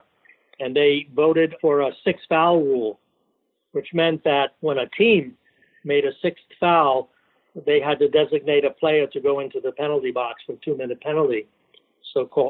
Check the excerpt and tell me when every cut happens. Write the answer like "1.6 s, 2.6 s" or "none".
1.5 s, 4.5 s